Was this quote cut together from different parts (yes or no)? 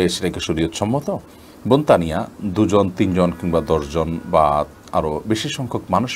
no